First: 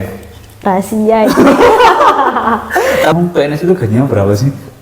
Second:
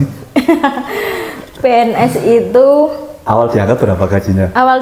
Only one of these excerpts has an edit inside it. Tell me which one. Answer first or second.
first